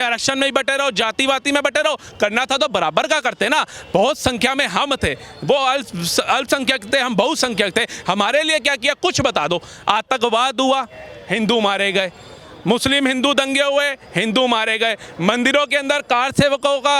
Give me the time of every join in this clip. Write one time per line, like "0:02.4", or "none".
none